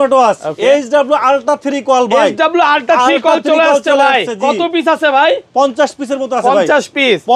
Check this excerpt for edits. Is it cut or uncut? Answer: uncut